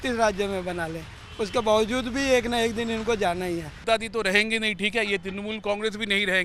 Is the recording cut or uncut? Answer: cut